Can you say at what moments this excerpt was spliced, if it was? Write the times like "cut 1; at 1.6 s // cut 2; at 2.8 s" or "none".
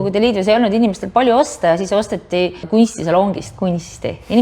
cut 1; at 2.6 s